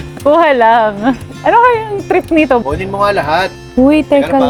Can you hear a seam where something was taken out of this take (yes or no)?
no